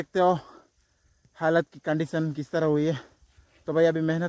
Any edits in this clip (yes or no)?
no